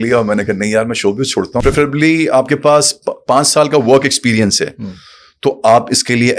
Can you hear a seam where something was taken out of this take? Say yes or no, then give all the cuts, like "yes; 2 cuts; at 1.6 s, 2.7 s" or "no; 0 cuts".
yes; 1 cut; at 1.5 s